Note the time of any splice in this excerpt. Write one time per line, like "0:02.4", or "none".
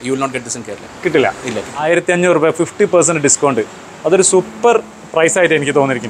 0:01.7